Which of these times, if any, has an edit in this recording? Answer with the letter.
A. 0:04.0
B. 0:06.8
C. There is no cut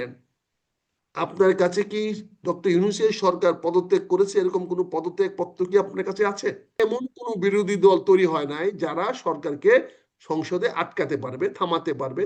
B